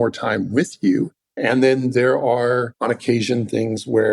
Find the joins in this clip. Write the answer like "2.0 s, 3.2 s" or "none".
1.2 s, 2.7 s